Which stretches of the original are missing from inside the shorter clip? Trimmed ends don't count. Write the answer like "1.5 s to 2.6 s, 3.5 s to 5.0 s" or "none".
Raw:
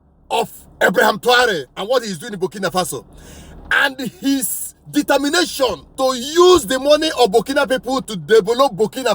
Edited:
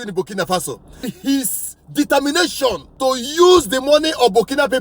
3.3 s to 4.1 s

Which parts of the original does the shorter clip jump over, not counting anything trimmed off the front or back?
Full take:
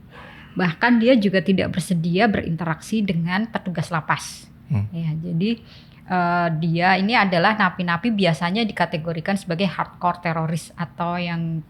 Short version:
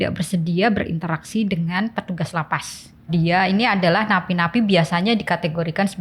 4.6 s to 6.6 s

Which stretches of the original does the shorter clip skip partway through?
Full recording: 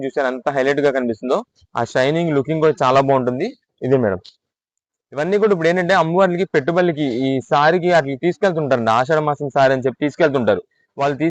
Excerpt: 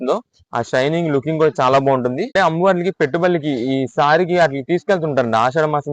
3.5 s to 5.8 s

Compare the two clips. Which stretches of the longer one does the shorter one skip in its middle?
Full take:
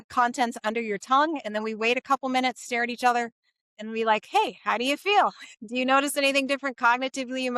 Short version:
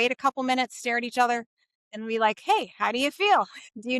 none

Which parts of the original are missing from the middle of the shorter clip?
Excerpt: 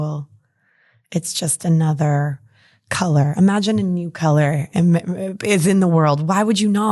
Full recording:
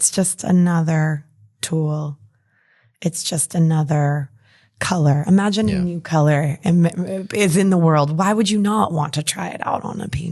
none

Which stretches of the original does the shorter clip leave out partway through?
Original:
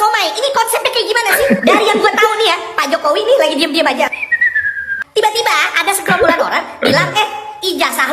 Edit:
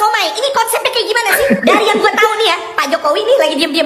none

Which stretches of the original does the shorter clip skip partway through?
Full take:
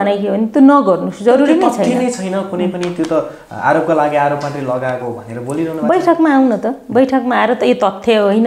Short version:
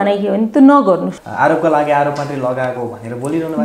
1.1 s to 3.4 s

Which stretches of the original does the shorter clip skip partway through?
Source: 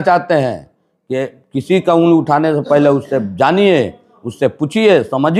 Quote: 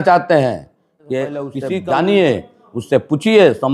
1.6 s to 3.1 s

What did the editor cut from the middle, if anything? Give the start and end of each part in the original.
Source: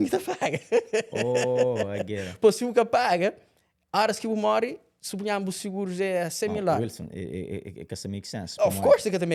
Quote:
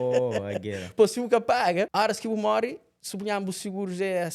3.4 s to 3.9 s

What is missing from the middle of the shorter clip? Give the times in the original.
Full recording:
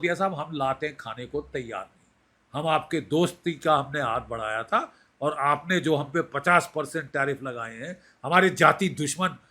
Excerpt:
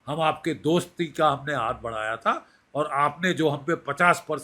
none

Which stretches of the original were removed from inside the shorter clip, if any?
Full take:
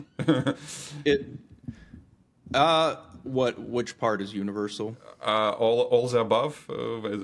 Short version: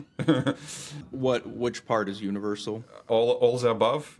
0.9 s to 3.0 s, 5.2 s to 5.6 s

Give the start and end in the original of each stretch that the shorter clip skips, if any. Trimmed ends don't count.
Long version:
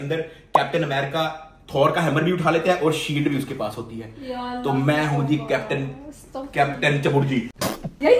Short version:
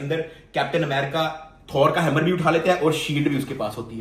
none

